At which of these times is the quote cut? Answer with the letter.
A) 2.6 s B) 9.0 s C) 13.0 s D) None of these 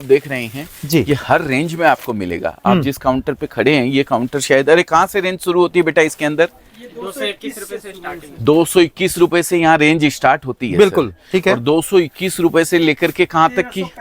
D